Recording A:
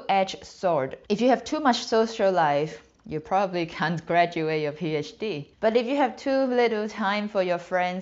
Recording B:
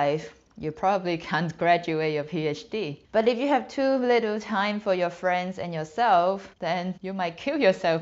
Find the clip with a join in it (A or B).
A